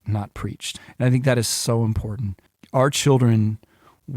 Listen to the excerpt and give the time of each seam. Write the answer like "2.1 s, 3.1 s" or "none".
0.7 s, 2.5 s